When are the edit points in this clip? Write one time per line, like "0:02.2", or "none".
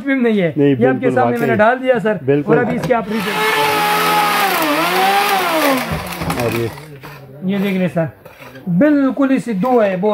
0:03.3